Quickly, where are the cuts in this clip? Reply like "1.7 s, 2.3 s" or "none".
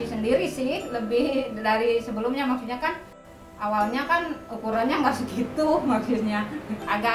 3.2 s